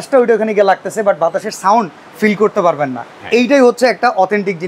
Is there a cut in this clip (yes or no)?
no